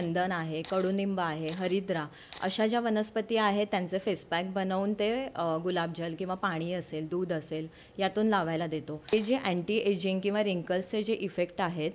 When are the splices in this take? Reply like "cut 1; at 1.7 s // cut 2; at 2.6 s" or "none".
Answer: cut 1; at 9.1 s

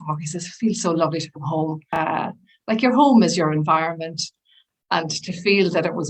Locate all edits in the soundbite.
cut 1; at 1.8 s

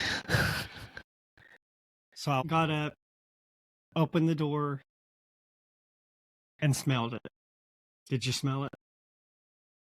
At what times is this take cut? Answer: cut 1; at 2.4 s

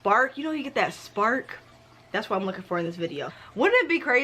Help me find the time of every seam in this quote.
cut 1; at 3.3 s

